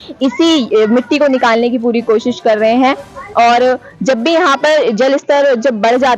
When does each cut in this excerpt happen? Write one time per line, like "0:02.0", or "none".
none